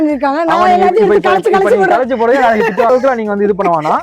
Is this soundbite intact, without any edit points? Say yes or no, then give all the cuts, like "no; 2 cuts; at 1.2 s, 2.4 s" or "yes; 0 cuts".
no; 1 cut; at 2.9 s